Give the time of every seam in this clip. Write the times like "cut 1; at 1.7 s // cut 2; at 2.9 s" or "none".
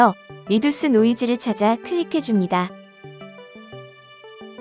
cut 1; at 2.7 s